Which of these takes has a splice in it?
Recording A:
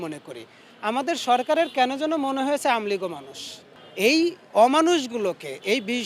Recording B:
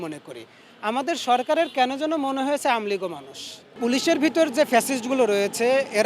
B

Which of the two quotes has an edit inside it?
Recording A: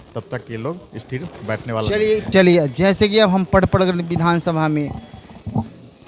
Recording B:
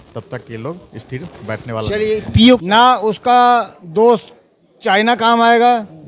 B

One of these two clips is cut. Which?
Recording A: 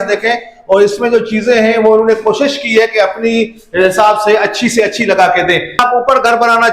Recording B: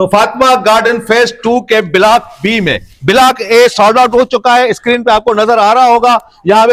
A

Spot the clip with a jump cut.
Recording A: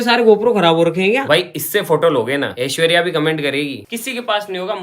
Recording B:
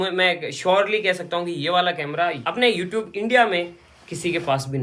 A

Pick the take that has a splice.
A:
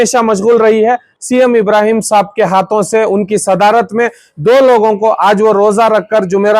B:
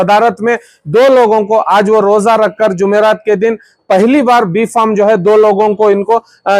A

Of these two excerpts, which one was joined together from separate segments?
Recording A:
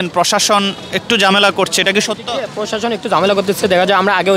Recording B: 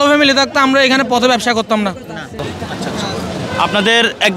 B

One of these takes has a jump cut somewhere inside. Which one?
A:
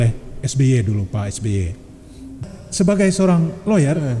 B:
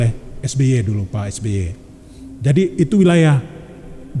A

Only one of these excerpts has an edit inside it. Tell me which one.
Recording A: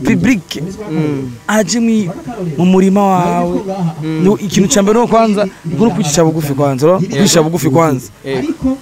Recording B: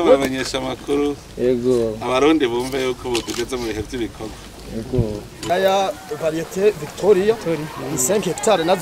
B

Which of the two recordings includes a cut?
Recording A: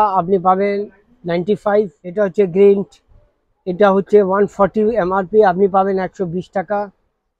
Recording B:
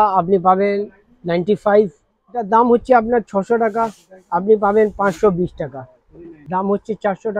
B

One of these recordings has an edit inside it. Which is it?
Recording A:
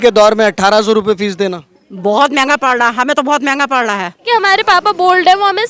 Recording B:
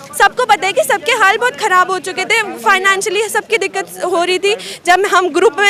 A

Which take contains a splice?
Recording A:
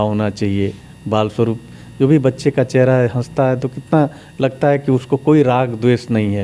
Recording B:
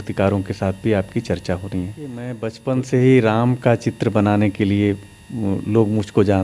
B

